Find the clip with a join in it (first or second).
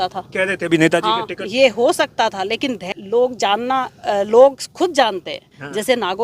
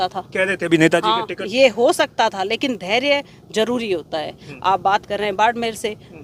first